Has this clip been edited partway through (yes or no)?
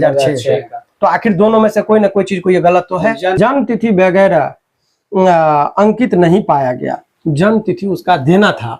yes